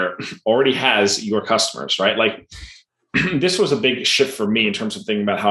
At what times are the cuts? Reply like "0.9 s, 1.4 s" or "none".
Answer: none